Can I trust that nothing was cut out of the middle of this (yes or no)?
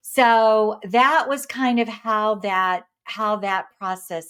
yes